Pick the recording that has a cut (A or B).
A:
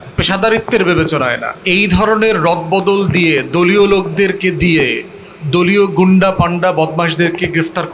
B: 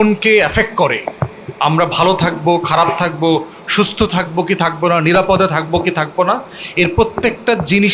A